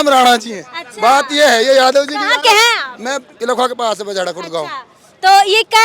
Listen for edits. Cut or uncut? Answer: uncut